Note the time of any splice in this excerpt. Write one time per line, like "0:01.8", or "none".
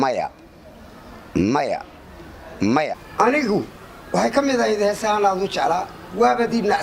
0:03.0